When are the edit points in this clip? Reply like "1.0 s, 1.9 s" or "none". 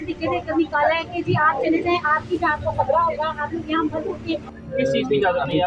4.5 s